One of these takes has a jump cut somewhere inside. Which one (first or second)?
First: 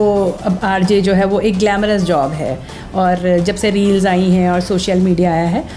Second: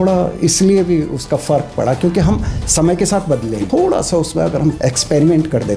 second